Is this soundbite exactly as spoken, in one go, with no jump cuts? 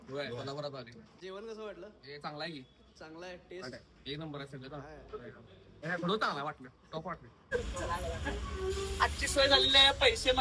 no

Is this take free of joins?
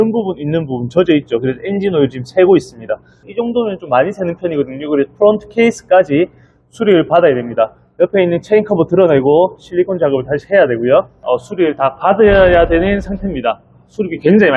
no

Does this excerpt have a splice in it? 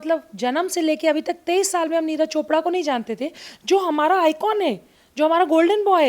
no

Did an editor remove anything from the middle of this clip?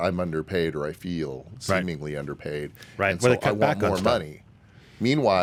no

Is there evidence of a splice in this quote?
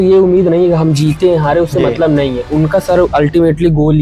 no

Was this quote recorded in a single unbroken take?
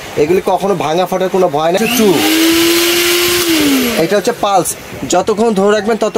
no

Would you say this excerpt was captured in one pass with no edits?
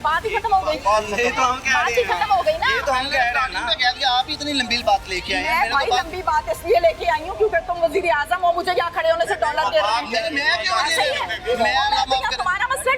yes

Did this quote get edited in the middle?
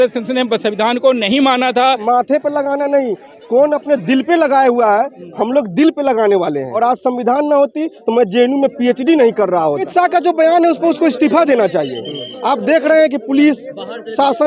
yes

